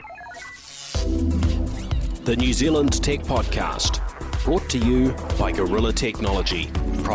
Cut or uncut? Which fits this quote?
uncut